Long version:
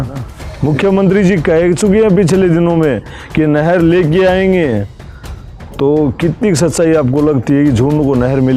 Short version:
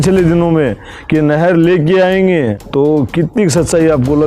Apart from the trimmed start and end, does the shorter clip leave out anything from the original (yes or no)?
yes